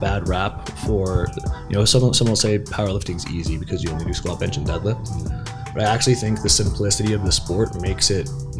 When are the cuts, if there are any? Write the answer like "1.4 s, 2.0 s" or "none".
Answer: none